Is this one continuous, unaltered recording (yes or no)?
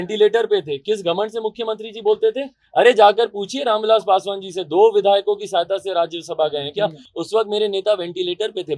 yes